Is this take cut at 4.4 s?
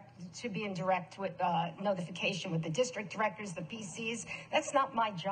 yes; 1 cut; at 4.4 s

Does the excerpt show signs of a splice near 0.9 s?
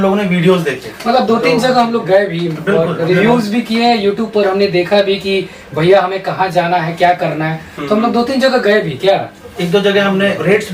no; 0 cuts

